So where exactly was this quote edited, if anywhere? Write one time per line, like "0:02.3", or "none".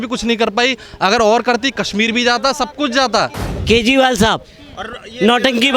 0:03.5